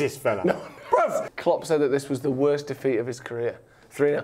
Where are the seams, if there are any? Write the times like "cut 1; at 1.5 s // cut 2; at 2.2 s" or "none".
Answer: cut 1; at 1.3 s